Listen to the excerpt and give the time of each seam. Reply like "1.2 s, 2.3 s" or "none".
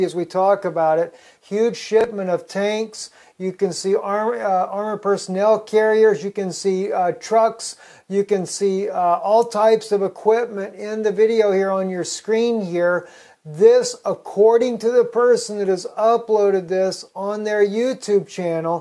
none